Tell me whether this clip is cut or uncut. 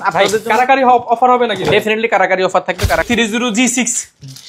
cut